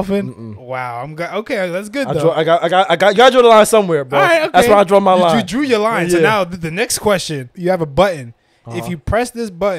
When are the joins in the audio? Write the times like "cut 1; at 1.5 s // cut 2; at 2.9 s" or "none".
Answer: cut 1; at 7.5 s